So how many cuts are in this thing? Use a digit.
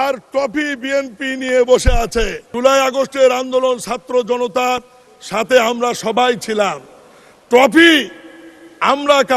1